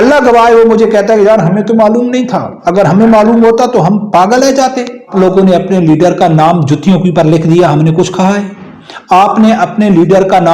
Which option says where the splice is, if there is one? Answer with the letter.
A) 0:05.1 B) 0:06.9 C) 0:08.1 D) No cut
A